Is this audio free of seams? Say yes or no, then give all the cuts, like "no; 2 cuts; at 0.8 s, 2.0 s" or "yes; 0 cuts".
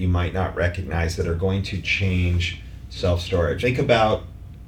no; 1 cut; at 3.6 s